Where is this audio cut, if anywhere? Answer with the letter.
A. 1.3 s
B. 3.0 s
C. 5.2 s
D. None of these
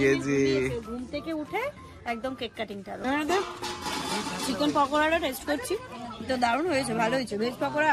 B